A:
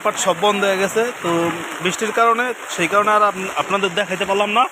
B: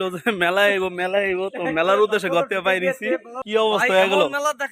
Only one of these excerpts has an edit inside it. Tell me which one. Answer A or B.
B